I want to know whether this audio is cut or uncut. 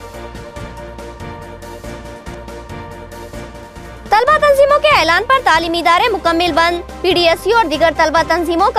uncut